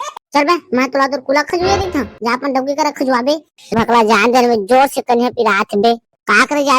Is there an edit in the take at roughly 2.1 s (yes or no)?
no